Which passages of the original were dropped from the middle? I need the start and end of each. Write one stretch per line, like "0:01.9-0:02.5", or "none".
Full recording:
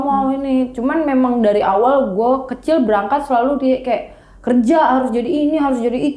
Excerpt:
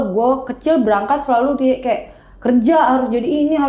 none